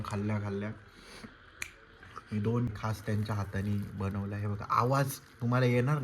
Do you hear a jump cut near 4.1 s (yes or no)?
no